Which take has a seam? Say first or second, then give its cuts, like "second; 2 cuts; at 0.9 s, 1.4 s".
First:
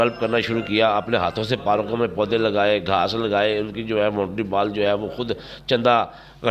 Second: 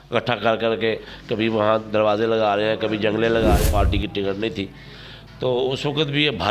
second; 2 cuts; at 1.1 s, 3.6 s